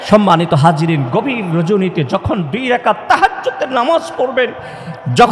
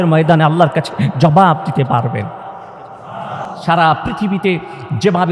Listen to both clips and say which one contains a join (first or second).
second